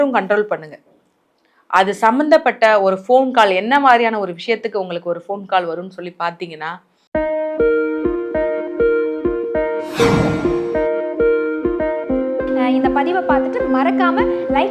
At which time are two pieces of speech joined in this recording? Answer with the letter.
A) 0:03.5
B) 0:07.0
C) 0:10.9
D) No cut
B